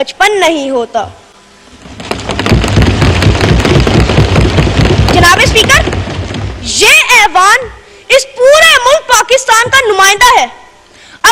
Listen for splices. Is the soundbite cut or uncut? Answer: uncut